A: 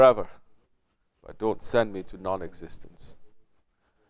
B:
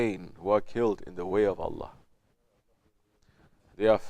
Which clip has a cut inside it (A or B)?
B